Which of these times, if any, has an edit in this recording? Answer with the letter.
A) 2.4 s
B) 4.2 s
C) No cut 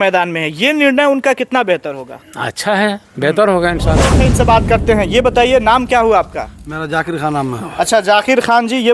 B